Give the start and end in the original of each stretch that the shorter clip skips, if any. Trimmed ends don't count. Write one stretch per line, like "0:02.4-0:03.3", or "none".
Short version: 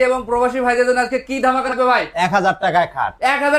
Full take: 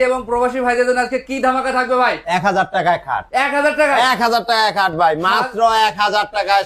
0:01.7-0:01.8